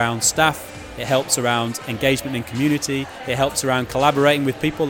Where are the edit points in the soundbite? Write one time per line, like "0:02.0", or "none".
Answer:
none